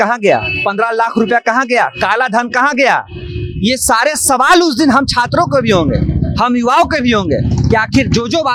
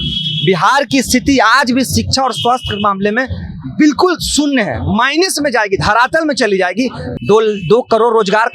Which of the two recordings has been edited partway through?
second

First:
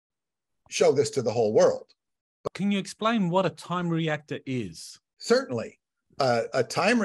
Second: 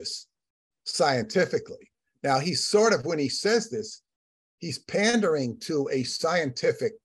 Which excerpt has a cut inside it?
first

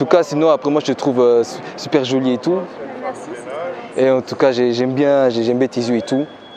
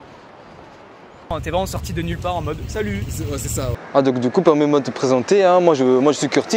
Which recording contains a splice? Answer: second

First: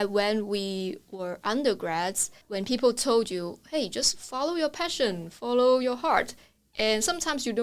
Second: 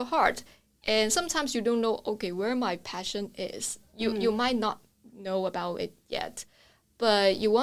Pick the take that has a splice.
first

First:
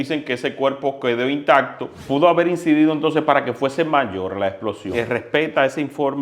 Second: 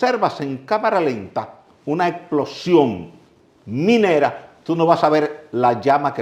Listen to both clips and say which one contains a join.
first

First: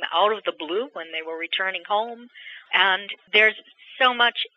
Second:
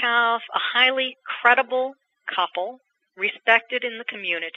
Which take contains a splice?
first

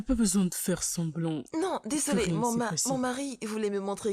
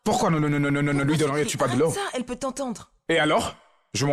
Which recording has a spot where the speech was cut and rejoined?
first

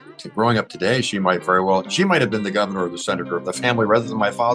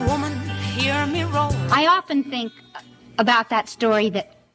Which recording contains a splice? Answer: second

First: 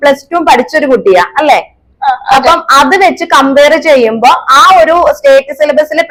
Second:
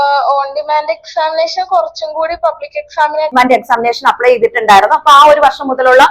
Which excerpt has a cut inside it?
second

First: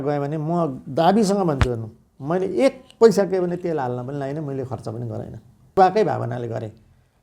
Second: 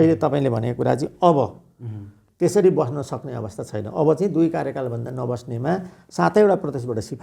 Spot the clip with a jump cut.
first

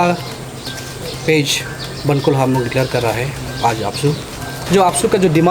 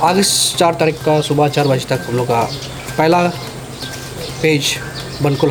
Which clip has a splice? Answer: first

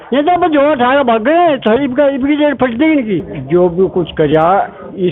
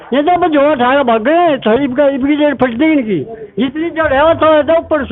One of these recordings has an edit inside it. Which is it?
first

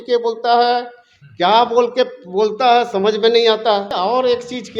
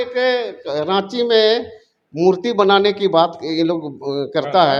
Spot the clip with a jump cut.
first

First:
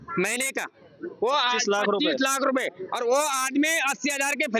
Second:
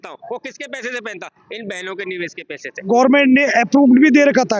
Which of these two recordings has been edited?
second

